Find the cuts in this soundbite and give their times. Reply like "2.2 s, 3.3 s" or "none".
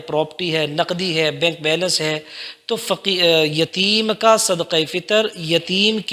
none